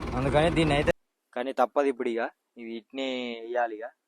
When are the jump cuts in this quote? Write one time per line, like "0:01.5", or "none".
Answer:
0:00.9

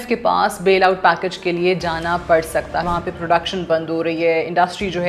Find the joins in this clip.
0:02.8

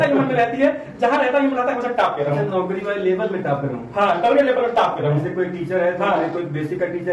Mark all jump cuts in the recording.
none

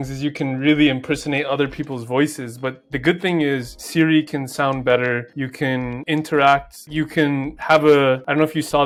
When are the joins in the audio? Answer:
none

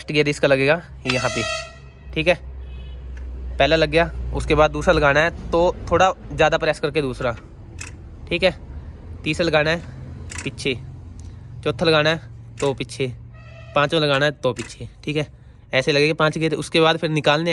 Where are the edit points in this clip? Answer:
none

